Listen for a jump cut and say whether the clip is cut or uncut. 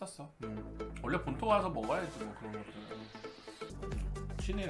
cut